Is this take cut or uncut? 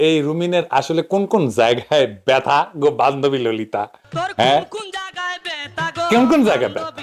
uncut